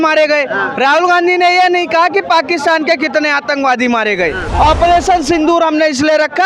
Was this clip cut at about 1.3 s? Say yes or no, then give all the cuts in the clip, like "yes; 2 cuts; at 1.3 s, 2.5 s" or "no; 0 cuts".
no; 1 cut; at 4.5 s